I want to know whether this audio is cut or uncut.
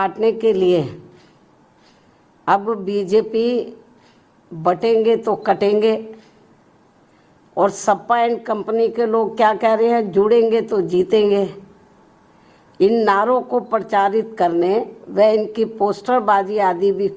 uncut